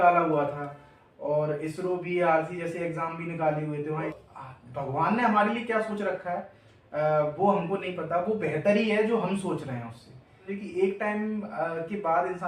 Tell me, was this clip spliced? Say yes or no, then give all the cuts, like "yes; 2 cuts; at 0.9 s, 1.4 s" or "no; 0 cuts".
yes; 2 cuts; at 4.1 s, 10.5 s